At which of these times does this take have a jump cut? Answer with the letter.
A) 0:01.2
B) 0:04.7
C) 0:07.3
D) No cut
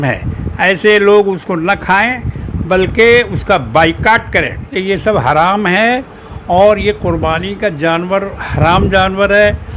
B